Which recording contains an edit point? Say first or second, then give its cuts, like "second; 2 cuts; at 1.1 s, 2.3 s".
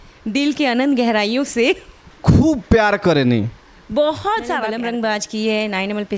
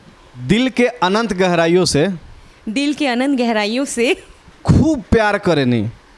first; 1 cut; at 4.7 s